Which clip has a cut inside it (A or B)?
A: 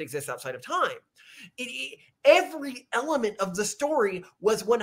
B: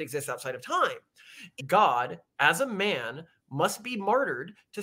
B